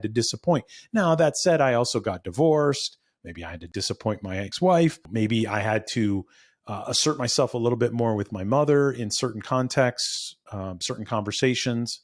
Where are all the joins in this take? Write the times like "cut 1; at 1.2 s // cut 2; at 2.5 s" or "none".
cut 1; at 4.0 s